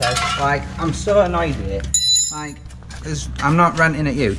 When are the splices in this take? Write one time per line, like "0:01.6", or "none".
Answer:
none

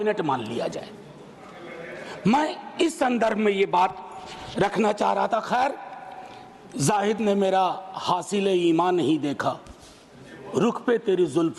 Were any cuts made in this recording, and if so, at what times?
none

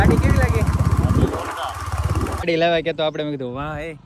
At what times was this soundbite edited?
0:02.5

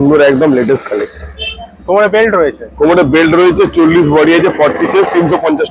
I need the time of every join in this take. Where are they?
none

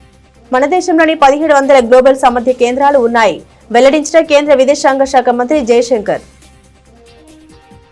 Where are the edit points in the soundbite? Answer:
none

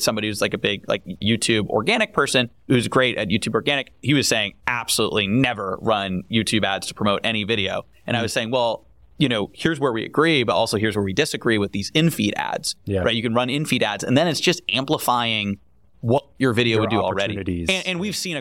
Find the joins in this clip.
0:01.2
0:02.7
0:04.1

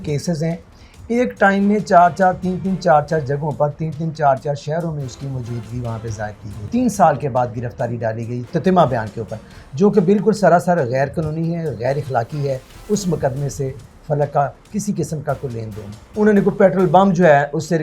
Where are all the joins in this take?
0:06.6
0:16.0

